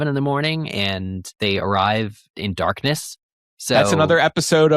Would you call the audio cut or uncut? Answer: cut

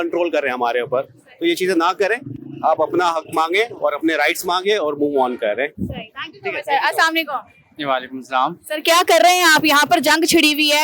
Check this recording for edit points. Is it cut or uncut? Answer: uncut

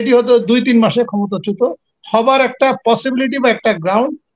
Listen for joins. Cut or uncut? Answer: uncut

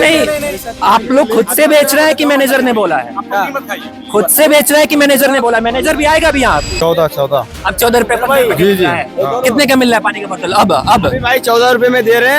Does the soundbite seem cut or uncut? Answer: cut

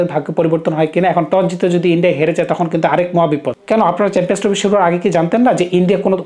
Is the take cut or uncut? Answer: cut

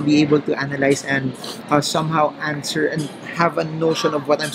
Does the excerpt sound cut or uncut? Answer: uncut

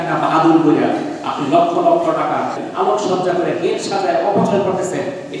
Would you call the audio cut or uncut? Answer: cut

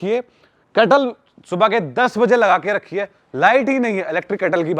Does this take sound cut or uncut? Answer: uncut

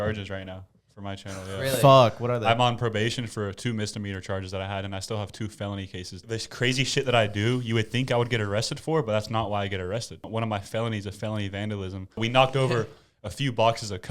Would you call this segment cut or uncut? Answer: cut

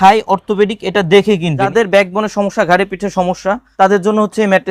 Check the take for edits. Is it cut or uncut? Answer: cut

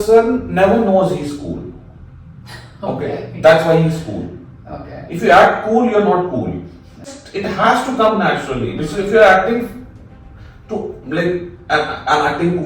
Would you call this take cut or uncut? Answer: cut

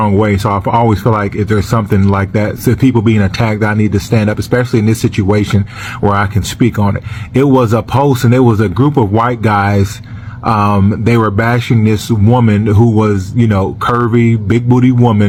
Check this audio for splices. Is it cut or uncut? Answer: uncut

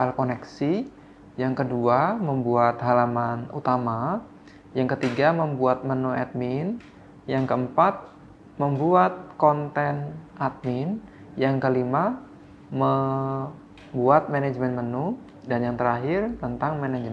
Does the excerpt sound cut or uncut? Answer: uncut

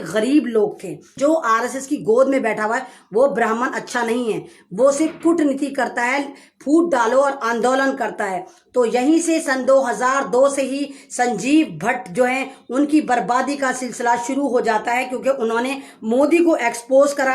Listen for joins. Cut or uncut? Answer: cut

